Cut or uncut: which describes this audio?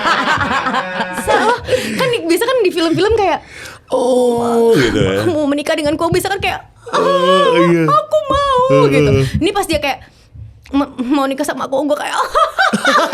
cut